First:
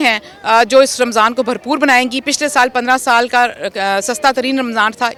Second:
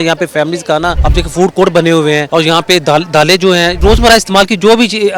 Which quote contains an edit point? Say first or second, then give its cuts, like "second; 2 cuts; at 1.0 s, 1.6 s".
second; 3 cuts; at 1.0 s, 2.2 s, 3.7 s